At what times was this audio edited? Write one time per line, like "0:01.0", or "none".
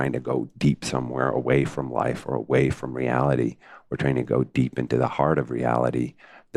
none